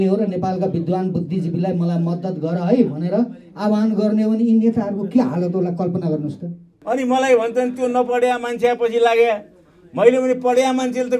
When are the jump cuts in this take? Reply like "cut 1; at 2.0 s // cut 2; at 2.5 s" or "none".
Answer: cut 1; at 6.7 s